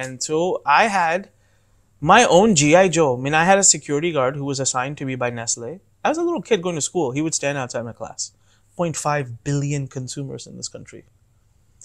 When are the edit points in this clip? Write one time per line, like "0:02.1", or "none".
0:08.7